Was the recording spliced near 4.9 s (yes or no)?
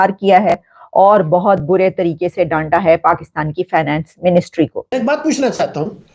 yes